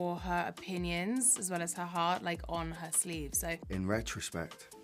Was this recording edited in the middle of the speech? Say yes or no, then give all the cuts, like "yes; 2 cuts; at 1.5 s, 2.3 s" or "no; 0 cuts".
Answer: yes; 1 cut; at 3.5 s